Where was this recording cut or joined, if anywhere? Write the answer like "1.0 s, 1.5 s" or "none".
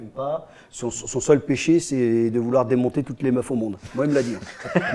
none